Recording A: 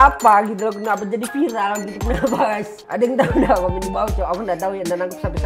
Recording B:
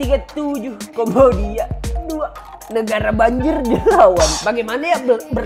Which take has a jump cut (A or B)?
B